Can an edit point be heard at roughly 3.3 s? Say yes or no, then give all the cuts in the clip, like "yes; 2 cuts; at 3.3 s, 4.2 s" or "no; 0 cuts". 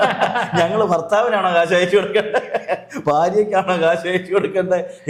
no; 0 cuts